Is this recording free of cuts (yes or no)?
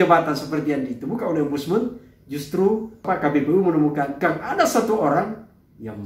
yes